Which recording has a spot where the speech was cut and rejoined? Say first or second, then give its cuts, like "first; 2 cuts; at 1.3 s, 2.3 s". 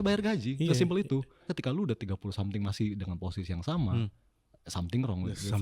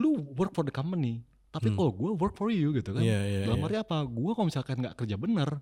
first; 1 cut; at 1.4 s